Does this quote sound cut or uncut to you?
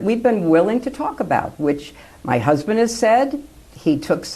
cut